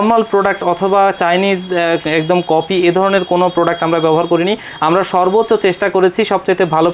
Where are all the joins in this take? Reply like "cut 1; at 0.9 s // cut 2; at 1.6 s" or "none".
none

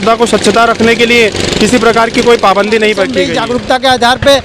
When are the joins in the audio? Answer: cut 1; at 3.2 s

